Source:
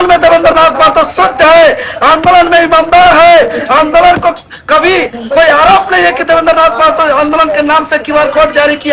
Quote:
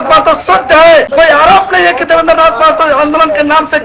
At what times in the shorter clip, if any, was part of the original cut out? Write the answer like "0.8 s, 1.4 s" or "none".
1.1 s